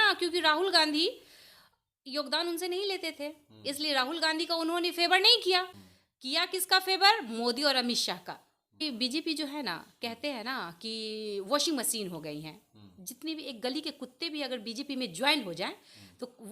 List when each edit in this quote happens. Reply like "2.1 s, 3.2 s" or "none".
5.7 s, 8.8 s